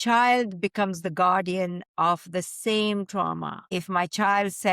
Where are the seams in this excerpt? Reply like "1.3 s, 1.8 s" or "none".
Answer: 3.6 s